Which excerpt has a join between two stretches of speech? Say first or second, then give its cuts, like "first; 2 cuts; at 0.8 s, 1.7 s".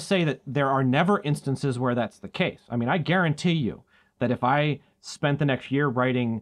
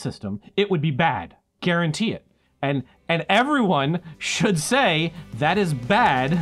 second; 1 cut; at 2.6 s